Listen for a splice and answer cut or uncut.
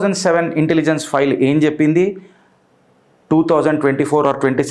uncut